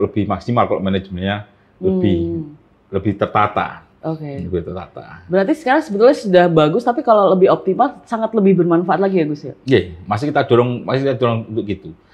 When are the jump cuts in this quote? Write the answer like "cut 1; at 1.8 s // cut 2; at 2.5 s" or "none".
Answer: none